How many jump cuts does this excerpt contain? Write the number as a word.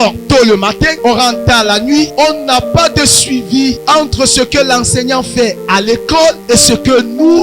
four